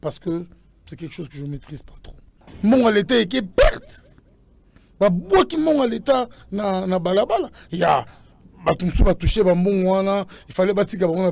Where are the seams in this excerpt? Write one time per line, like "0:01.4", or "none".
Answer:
0:02.5